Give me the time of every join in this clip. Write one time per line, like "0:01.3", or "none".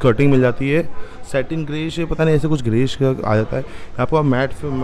none